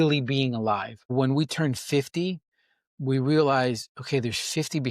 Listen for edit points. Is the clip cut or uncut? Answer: cut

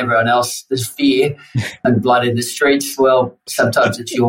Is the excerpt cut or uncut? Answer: cut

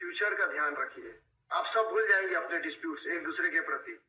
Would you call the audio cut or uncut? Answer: uncut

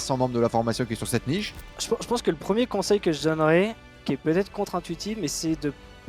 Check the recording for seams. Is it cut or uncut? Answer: cut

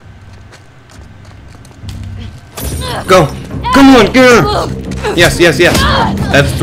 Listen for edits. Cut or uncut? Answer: uncut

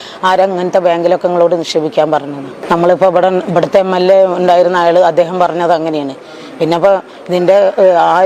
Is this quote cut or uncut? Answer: uncut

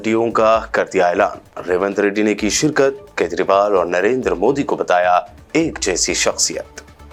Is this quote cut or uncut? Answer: uncut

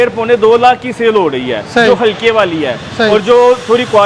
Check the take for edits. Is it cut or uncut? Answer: uncut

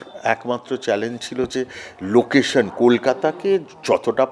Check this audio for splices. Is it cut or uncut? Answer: uncut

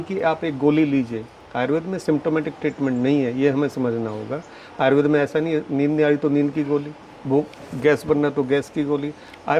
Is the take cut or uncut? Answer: uncut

